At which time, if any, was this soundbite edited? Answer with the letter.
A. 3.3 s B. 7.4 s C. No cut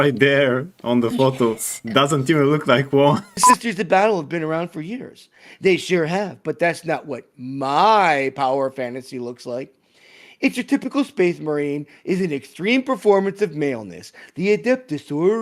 A